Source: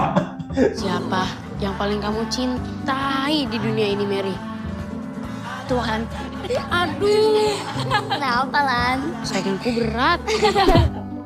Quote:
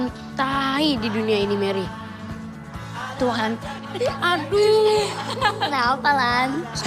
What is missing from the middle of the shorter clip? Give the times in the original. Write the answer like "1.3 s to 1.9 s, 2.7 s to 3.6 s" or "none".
none